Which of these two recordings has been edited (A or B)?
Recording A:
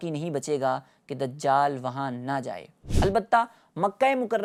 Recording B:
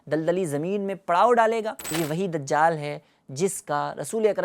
B